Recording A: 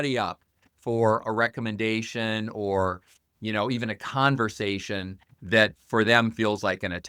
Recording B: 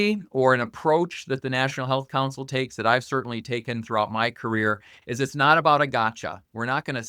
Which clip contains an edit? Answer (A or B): A